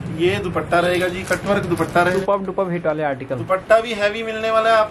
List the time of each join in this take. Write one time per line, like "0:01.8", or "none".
0:02.2